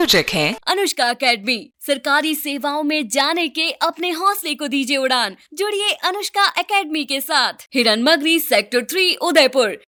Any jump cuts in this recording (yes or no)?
no